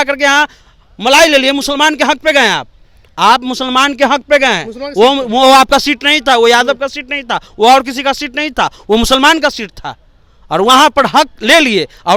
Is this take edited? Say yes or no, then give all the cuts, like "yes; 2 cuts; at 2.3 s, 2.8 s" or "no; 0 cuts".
no; 0 cuts